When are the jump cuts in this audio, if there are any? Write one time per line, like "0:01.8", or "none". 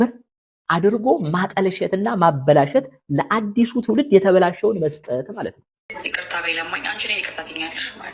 0:05.9